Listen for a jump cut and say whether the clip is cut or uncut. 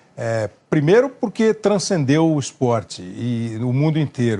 cut